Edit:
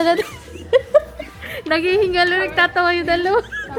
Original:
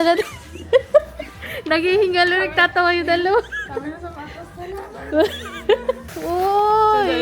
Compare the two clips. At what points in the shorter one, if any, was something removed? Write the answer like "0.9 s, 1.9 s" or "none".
none